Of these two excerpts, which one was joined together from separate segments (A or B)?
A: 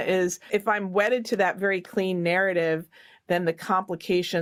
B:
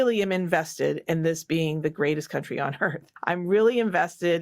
B